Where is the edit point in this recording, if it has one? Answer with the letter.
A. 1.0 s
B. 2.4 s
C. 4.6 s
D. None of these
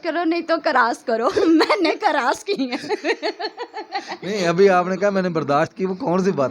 D